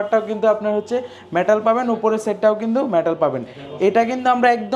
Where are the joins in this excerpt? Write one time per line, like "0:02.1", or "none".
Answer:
none